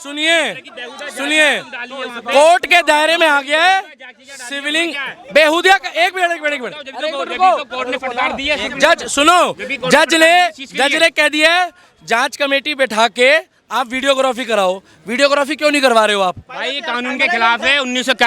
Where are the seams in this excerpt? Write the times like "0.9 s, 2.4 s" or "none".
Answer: none